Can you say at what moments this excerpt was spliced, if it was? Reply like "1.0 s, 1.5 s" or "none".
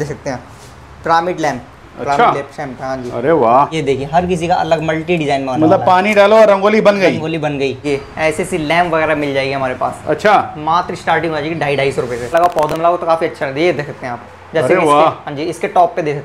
3.7 s, 7.8 s, 12.3 s